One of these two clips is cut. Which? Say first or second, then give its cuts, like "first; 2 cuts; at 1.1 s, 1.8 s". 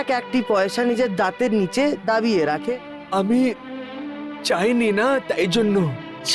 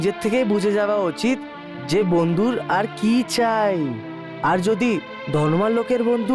first; 1 cut; at 2.7 s